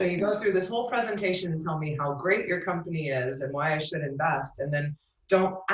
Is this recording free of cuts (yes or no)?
yes